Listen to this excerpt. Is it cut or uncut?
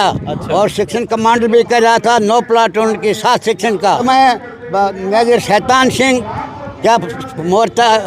cut